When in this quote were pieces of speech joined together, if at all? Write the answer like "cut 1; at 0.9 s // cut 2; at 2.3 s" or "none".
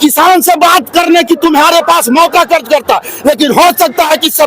cut 1; at 2.3 s